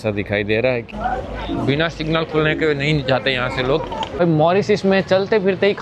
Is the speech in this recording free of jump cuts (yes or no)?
no